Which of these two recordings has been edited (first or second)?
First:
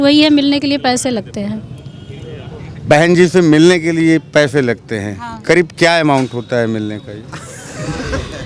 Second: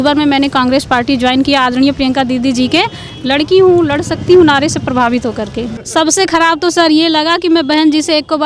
second